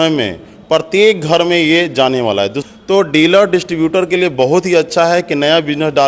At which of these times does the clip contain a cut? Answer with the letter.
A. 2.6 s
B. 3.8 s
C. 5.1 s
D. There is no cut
A